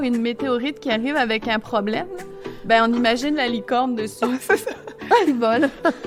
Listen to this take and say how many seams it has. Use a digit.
0